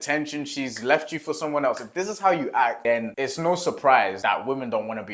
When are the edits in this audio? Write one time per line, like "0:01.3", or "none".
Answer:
0:04.2